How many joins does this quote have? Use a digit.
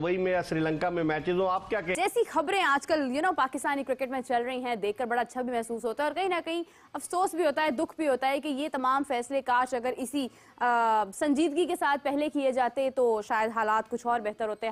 1